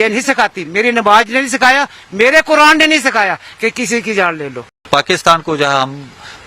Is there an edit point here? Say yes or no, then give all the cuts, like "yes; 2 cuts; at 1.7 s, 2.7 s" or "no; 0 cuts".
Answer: yes; 1 cut; at 4.9 s